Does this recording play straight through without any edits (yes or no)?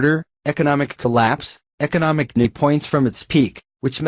yes